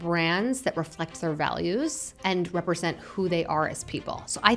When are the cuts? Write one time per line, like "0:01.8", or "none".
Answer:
0:02.1